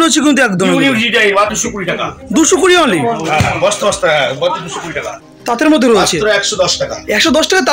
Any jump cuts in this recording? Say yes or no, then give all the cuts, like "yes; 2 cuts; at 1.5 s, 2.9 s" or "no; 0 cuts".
yes; 2 cuts; at 1.5 s, 5.2 s